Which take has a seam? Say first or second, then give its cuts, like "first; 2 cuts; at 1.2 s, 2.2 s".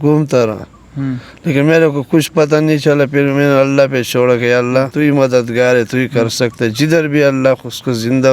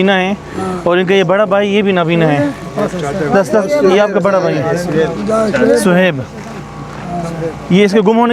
first; 1 cut; at 4.9 s